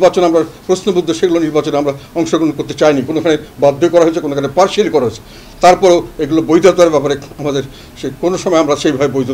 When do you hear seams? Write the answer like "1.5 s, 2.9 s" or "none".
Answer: none